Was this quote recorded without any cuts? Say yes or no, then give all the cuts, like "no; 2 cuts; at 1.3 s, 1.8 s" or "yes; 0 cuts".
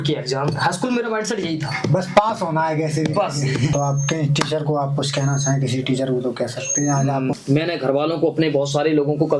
no; 2 cuts; at 3.7 s, 7.4 s